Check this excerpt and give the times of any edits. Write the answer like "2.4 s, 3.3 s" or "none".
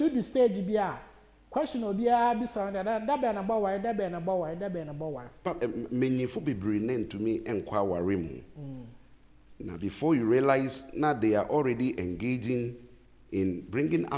5.4 s